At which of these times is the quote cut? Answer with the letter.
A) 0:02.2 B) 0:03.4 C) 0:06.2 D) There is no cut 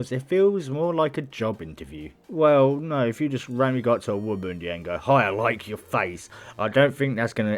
A